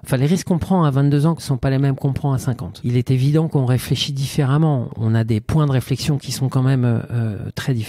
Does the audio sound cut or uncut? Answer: cut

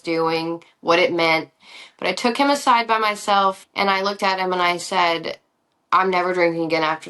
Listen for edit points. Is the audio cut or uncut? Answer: cut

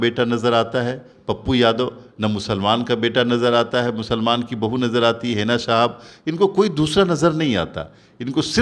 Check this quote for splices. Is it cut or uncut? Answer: uncut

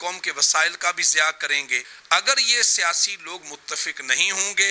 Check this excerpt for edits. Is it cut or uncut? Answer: cut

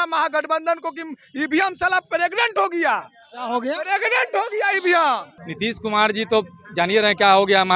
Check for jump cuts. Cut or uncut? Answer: cut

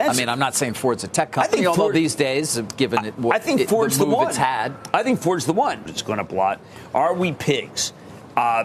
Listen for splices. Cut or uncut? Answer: cut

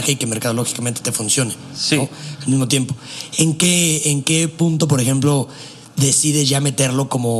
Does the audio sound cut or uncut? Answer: uncut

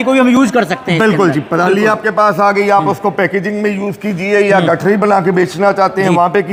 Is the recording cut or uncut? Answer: uncut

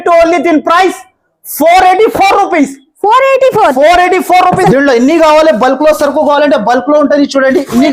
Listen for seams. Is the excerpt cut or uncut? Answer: cut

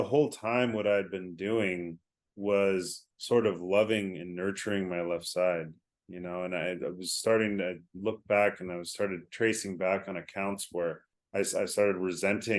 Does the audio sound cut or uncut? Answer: cut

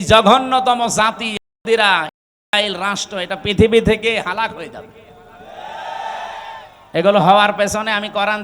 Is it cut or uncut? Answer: uncut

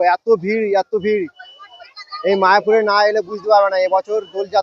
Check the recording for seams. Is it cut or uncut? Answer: uncut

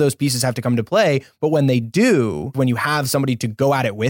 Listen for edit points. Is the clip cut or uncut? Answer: cut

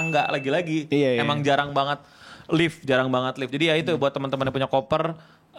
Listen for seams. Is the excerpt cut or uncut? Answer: uncut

